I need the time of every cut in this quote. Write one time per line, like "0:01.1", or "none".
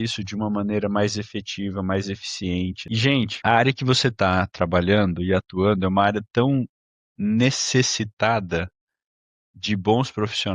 0:02.8